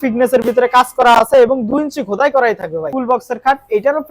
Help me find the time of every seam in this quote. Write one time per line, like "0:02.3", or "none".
0:02.9